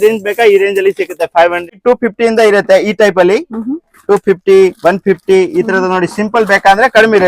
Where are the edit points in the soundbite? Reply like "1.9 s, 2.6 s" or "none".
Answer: 1.7 s